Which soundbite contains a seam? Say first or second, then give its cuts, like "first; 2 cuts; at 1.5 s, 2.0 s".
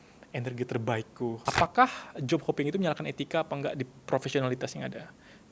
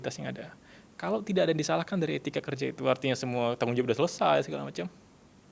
first; 1 cut; at 1.4 s